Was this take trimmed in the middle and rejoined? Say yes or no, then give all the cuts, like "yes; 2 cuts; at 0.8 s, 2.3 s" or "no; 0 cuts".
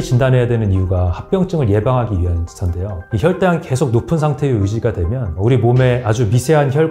no; 0 cuts